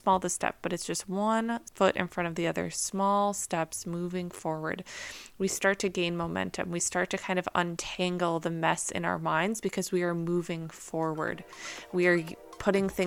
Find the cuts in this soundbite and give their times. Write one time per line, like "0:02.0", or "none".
0:01.7